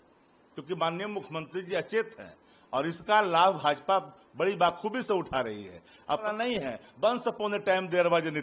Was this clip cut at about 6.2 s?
yes; 1 cut; at 6.2 s

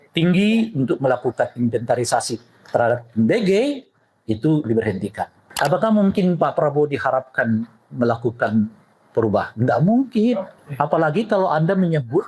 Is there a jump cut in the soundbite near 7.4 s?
no; 2 cuts; at 5.4 s, 10.6 s

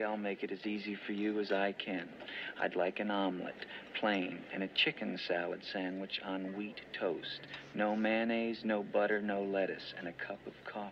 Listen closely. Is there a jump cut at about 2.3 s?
yes; 2 cuts; at 2.3 s, 7.5 s

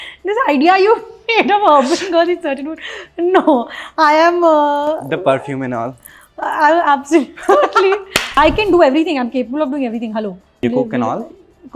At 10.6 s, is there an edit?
yes; 2 cuts; at 8.2 s, 10.6 s

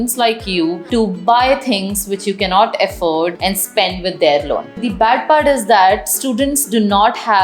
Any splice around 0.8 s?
yes; 3 cuts; at 0.8 s, 3.4 s, 4.9 s

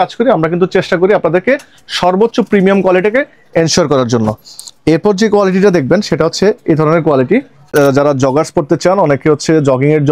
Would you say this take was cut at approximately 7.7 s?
yes; 1 cut; at 7.7 s

